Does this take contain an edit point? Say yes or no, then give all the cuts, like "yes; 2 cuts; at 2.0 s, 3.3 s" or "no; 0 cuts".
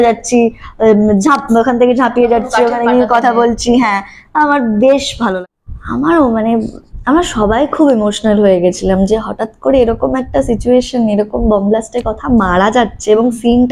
yes; 1 cut; at 5.3 s